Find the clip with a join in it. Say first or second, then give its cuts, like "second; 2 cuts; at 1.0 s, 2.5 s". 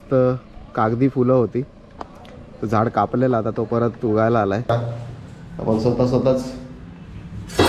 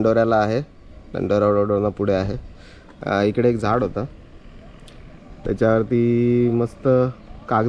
first; 1 cut; at 4.7 s